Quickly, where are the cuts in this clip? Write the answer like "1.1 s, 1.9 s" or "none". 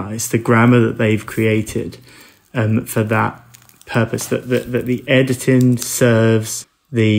none